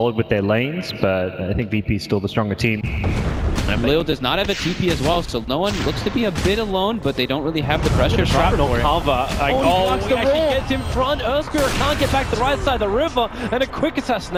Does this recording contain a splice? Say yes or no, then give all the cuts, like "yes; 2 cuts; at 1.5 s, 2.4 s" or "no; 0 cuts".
no; 0 cuts